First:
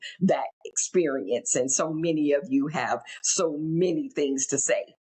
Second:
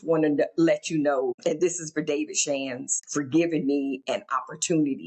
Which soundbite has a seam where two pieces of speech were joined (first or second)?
second